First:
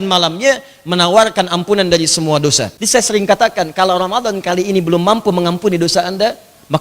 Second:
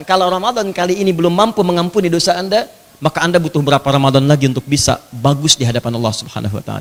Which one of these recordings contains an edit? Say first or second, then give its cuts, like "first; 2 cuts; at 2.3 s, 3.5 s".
first; 1 cut; at 2.7 s